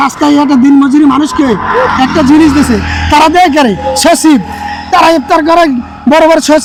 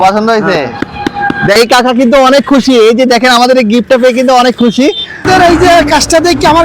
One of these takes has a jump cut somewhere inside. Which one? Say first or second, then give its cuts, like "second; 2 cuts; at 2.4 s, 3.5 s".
second; 2 cuts; at 1.6 s, 5.2 s